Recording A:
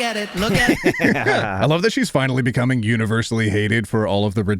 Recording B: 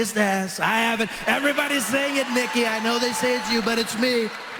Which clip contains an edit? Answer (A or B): A